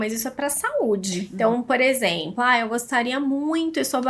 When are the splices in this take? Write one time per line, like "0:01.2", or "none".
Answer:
0:01.3